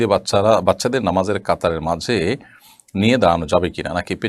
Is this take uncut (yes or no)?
yes